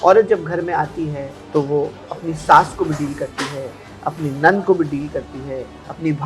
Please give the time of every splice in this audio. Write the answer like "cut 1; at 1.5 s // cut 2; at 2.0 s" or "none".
none